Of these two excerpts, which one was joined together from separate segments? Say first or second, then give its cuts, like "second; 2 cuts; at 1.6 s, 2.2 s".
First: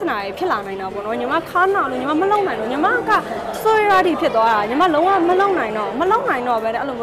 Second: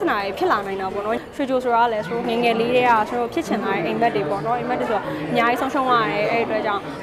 second; 1 cut; at 1.2 s